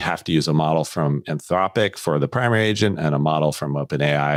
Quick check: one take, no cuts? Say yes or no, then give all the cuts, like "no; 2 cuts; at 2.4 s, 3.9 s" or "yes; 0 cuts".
yes; 0 cuts